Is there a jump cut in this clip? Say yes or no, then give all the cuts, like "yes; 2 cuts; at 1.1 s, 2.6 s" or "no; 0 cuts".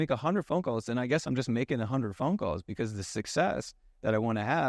no; 0 cuts